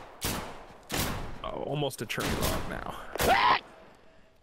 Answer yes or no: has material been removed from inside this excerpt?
no